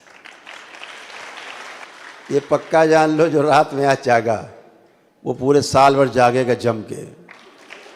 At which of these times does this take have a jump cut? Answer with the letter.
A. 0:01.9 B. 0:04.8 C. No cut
A